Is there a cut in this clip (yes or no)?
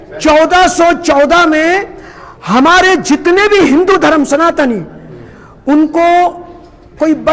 no